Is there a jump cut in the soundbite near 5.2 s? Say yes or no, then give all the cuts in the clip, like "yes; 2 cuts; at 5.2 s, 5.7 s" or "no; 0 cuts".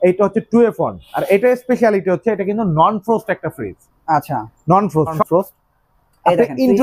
yes; 1 cut; at 5.2 s